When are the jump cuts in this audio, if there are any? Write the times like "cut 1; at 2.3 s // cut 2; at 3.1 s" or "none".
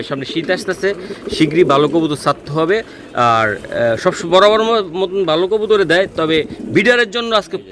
none